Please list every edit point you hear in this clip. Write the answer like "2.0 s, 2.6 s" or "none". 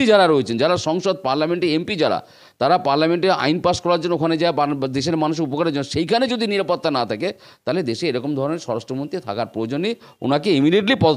none